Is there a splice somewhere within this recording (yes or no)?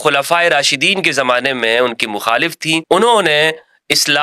yes